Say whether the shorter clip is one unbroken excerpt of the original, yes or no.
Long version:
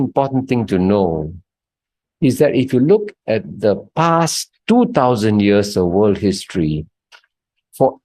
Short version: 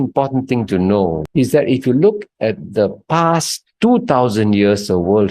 no